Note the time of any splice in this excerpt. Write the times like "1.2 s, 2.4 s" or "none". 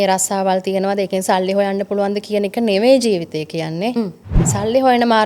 4.4 s